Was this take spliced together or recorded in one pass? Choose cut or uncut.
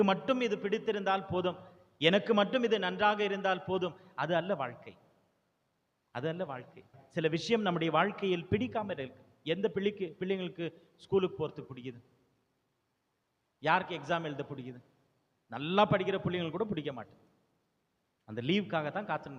cut